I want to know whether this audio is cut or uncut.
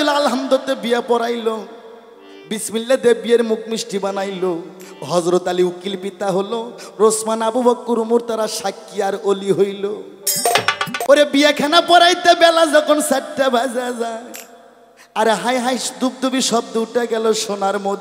cut